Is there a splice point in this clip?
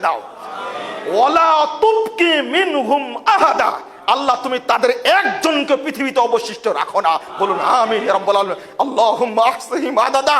no; 0 cuts

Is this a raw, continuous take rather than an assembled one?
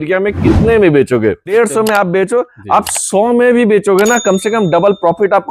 no; 1 cut; at 1.5 s

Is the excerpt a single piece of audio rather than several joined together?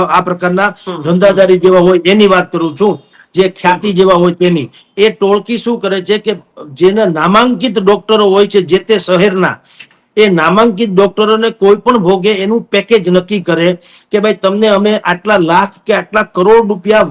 yes; 0 cuts

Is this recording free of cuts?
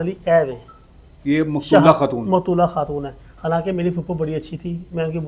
yes; 0 cuts

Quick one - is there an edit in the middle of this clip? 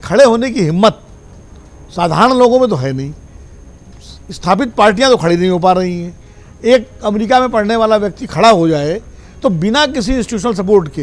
no; 0 cuts

